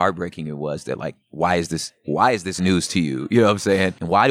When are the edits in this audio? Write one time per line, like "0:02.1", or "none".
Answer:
none